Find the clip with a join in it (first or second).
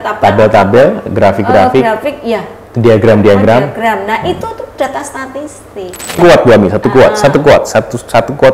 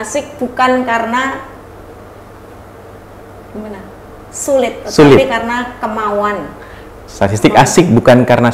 first